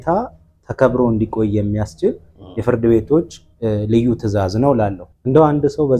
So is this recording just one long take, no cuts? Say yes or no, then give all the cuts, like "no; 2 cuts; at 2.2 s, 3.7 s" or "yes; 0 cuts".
no; 1 cut; at 5.1 s